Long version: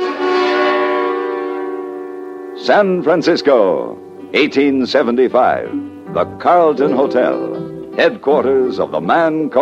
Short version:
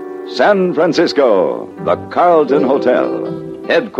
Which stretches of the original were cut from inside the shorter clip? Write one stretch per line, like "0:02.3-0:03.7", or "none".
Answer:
0:04.0-0:06.0